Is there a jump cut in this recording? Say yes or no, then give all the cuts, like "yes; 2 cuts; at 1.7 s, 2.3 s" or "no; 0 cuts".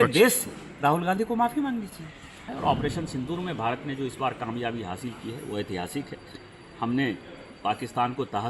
yes; 1 cut; at 2.5 s